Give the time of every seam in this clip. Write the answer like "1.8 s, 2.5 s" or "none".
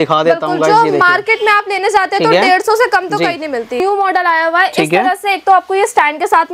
3.8 s